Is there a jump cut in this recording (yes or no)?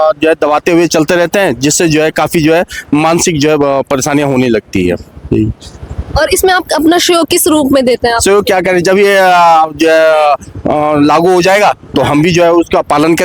no